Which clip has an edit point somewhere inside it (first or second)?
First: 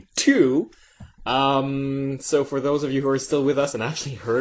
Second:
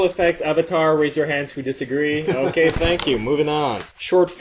second